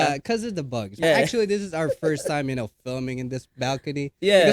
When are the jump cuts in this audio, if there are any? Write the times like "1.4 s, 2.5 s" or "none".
0.9 s